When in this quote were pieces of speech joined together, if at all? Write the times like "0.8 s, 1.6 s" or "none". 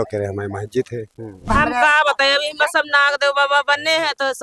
1.5 s

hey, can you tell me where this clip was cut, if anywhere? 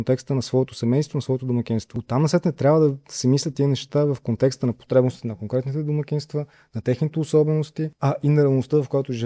2.0 s, 7.8 s

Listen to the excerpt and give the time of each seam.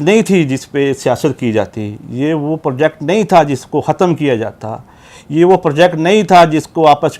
none

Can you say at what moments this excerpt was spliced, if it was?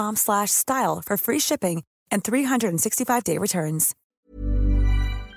4.0 s

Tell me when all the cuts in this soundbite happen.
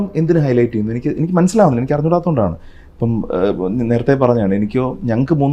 none

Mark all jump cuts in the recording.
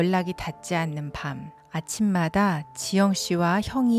1.6 s

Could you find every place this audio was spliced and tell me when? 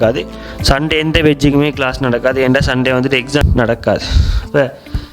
3.4 s

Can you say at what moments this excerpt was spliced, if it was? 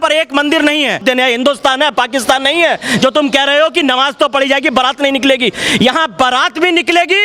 1.0 s

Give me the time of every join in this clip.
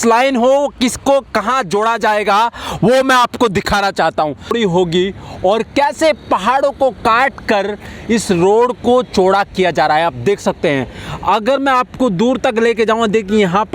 4.5 s

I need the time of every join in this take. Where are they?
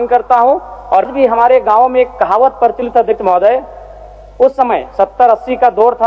1.1 s

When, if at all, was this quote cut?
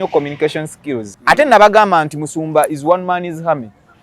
1.1 s

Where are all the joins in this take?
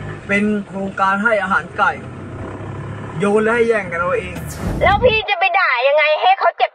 4.6 s

